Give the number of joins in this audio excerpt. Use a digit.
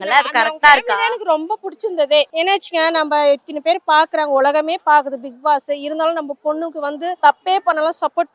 2